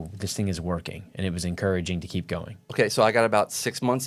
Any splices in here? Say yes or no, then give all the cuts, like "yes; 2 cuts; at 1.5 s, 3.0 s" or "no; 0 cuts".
yes; 1 cut; at 2.6 s